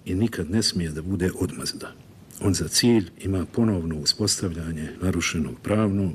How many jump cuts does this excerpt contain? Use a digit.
1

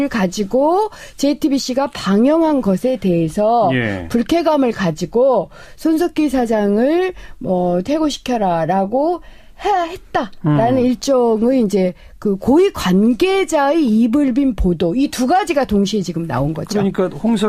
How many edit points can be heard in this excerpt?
0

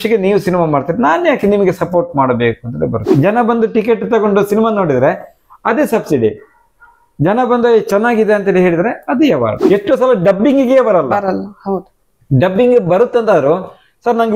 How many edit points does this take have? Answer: 2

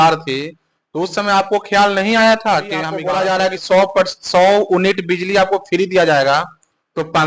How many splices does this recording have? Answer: 1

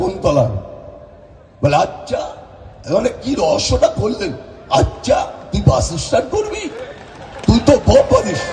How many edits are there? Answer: 0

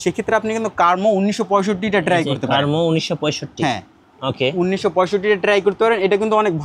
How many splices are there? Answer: 0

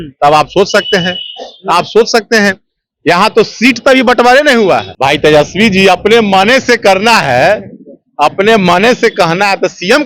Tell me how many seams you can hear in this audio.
1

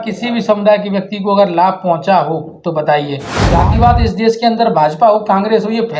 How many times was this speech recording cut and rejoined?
1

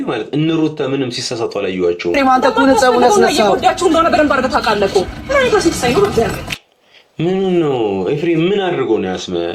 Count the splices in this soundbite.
1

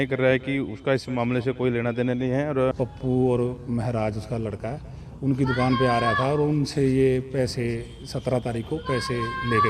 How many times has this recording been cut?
1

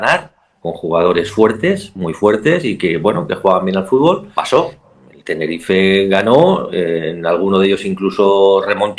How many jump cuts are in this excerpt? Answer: 1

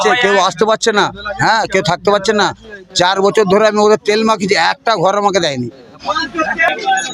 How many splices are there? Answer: 1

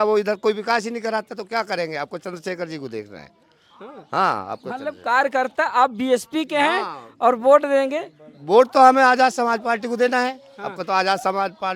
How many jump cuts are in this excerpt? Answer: 0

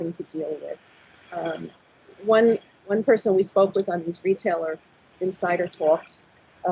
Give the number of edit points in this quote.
0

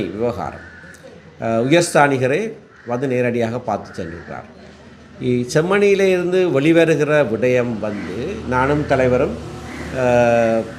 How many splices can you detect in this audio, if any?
0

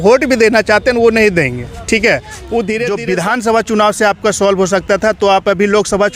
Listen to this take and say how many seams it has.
1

